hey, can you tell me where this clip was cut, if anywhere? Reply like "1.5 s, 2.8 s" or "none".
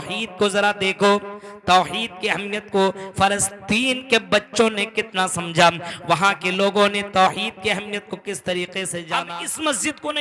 9.2 s